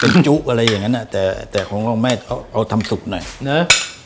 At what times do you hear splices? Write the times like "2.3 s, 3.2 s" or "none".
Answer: none